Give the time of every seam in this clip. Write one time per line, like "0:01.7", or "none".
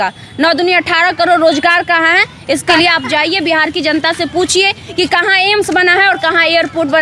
0:02.7